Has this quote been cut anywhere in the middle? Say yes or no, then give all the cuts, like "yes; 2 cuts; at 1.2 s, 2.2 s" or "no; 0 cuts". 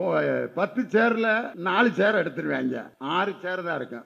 yes; 2 cuts; at 1.5 s, 3.2 s